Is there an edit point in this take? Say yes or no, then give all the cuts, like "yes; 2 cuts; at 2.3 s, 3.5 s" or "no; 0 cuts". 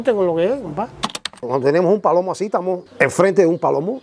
yes; 2 cuts; at 1.4 s, 2.9 s